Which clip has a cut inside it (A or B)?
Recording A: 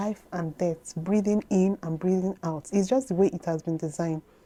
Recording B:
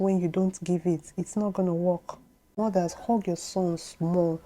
B